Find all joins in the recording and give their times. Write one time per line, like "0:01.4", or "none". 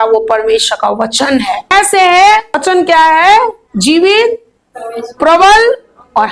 0:01.7
0:02.6